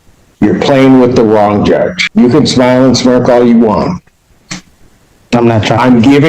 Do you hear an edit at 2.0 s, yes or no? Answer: yes